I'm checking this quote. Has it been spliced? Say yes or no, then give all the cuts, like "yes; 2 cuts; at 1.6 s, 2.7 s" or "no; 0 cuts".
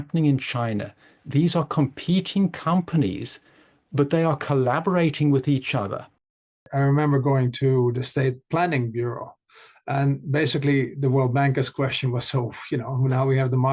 yes; 2 cuts; at 6.7 s, 7.9 s